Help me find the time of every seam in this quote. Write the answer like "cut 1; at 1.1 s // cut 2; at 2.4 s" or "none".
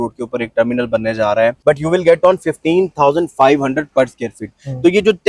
cut 1; at 1.6 s